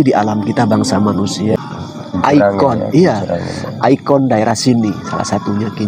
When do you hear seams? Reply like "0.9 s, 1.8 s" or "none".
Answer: 1.5 s